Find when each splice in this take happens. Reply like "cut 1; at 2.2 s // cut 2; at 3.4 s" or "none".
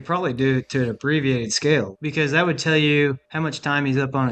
cut 1; at 1.9 s // cut 2; at 3.3 s